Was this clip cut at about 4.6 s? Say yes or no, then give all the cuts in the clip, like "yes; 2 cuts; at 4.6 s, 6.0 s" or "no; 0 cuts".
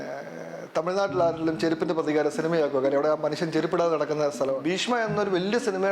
yes; 1 cut; at 4.6 s